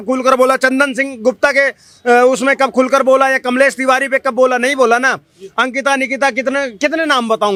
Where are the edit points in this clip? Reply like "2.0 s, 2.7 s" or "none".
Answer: none